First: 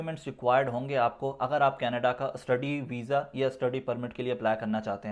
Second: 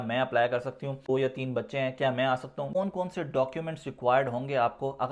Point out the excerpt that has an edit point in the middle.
second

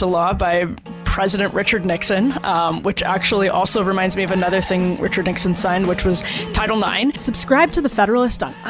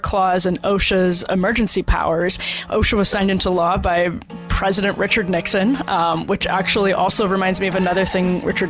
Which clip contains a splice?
first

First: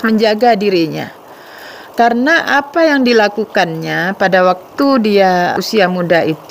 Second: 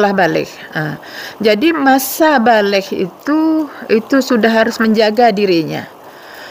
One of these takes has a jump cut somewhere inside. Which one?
first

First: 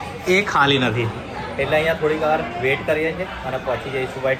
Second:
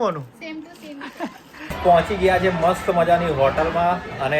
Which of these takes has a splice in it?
second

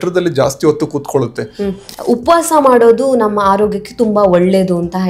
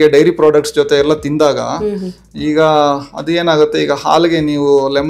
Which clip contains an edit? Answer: first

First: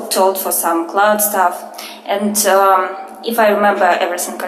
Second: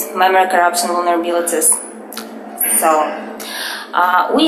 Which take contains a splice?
first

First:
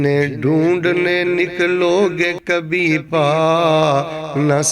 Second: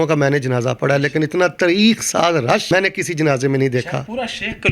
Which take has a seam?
second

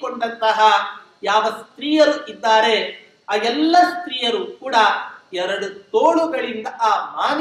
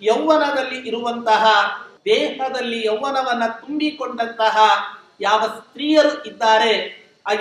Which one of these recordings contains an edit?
second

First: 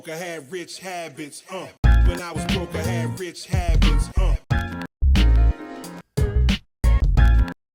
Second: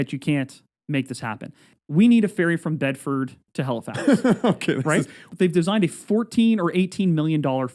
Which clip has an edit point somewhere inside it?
second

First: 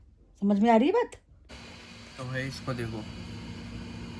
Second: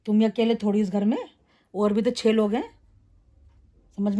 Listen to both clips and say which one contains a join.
first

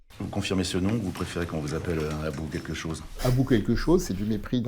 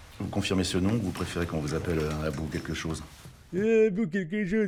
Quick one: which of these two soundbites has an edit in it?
first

